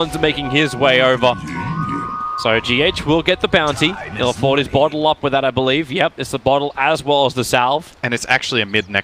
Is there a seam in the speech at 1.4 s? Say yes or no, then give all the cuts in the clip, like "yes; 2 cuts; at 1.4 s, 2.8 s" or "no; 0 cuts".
no; 1 cut; at 6.7 s